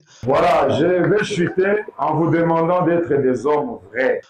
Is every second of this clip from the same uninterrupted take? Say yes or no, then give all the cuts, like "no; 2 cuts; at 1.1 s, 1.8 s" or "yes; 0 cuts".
no; 1 cut; at 1.9 s